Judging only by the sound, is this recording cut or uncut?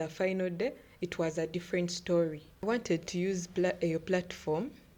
cut